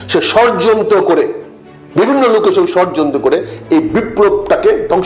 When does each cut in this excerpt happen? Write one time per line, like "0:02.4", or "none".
none